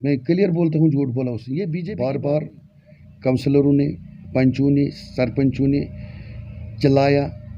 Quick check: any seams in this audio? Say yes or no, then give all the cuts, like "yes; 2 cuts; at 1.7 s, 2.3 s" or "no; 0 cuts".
yes; 1 cut; at 1.8 s